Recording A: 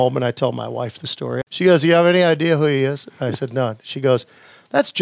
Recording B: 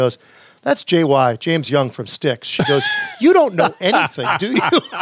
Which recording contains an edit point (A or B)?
A